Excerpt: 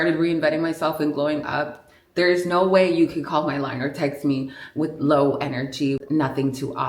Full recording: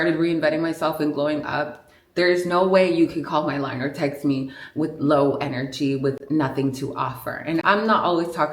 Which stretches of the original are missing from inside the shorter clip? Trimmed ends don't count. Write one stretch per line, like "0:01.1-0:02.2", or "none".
0:06.0-0:06.2